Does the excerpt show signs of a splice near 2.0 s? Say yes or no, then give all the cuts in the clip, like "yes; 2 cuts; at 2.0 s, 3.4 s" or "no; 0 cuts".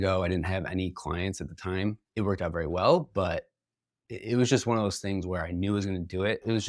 yes; 1 cut; at 2.0 s